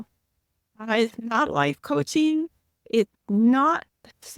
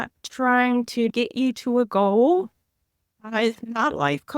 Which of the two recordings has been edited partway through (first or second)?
second